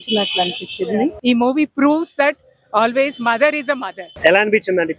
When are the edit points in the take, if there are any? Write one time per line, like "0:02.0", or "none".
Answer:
0:01.2
0:04.1